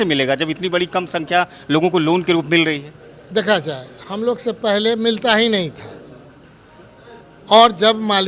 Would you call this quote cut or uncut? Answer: uncut